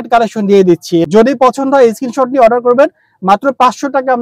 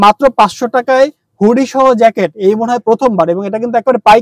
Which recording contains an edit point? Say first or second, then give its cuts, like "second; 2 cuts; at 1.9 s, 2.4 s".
first; 1 cut; at 1.1 s